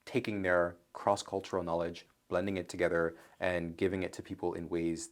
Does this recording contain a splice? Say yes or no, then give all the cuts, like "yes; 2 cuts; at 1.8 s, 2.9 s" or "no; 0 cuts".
no; 0 cuts